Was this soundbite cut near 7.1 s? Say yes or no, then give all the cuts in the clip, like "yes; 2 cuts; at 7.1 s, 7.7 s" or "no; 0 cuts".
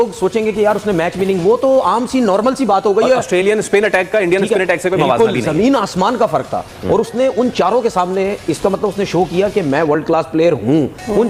no; 0 cuts